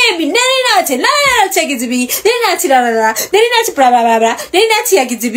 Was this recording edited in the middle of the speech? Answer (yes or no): no